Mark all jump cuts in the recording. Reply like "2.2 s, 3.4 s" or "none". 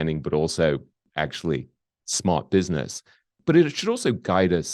1.0 s, 3.4 s